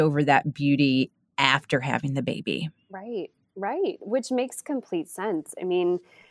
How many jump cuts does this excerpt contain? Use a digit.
0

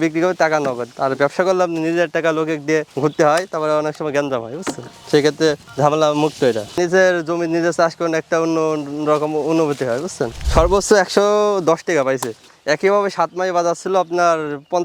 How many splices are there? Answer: 1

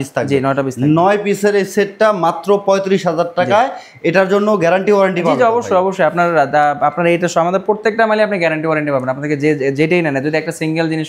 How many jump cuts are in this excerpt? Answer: 0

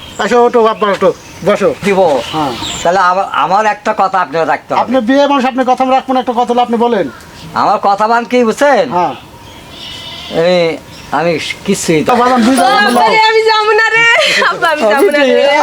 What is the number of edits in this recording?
2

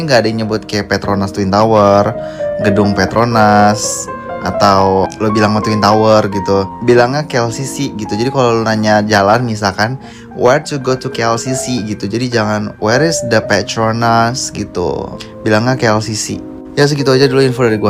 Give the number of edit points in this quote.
0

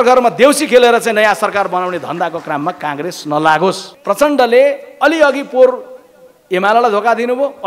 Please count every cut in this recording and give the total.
1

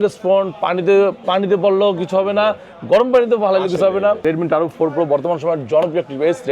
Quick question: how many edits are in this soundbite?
1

